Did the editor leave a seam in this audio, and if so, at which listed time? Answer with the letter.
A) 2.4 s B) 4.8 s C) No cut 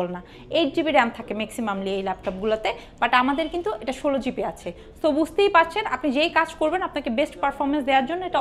C